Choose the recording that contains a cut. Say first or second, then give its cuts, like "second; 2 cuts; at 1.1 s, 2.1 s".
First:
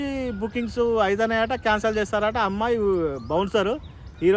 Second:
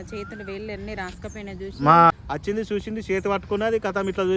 second; 1 cut; at 2.1 s